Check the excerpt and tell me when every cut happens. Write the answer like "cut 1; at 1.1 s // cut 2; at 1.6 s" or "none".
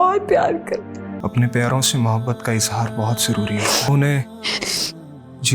cut 1; at 1.1 s // cut 2; at 3.9 s